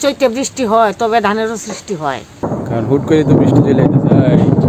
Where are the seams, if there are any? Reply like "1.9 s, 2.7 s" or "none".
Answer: 2.4 s